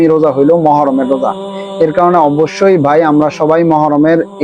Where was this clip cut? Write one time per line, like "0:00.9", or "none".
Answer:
none